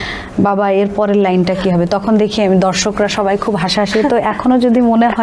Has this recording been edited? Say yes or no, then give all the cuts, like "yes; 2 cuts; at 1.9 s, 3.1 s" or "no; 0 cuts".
no; 0 cuts